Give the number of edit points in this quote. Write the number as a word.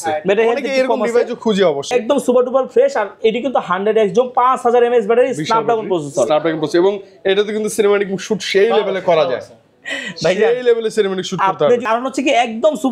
two